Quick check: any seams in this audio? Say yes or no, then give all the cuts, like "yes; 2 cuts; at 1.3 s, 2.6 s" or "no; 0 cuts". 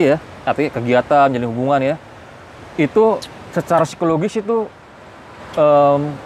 no; 0 cuts